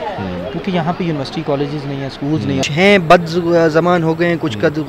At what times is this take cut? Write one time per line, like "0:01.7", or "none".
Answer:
0:02.6